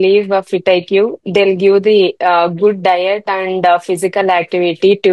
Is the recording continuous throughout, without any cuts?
yes; 0 cuts

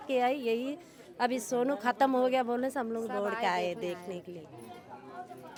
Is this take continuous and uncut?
yes; 0 cuts

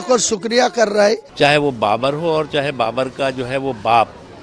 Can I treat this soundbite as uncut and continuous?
no; 1 cut; at 1.3 s

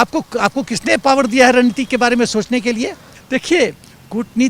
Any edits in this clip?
yes; 1 cut; at 3.1 s

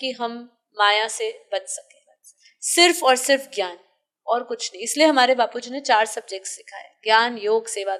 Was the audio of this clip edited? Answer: no; 0 cuts

